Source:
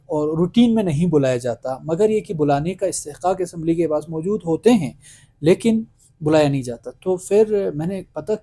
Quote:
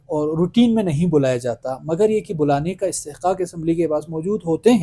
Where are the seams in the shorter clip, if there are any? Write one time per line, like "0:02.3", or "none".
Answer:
none